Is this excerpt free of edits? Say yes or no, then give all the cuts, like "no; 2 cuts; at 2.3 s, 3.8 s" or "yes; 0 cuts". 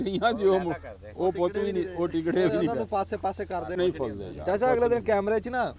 no; 1 cut; at 3.8 s